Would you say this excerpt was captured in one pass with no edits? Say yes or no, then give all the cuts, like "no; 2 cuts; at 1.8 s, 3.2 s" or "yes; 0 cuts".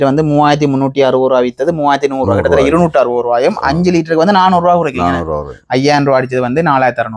yes; 0 cuts